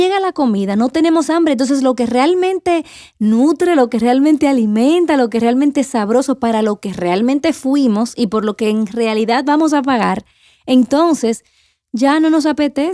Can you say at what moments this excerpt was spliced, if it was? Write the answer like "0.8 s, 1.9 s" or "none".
0.9 s